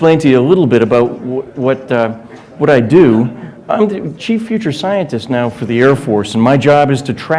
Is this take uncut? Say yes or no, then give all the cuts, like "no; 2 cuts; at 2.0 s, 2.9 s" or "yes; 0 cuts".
yes; 0 cuts